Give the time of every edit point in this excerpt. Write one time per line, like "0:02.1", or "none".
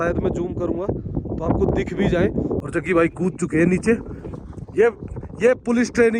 0:02.6